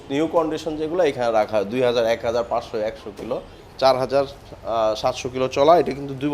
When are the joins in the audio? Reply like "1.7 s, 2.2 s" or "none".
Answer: 3.6 s